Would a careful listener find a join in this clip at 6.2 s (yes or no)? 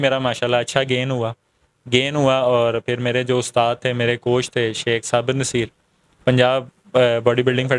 no